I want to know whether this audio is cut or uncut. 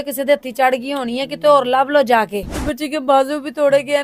cut